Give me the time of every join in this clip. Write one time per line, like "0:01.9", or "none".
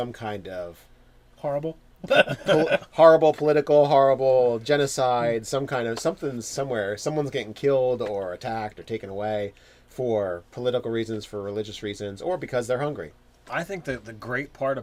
none